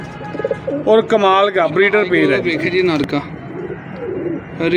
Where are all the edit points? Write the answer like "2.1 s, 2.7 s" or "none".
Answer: 2.4 s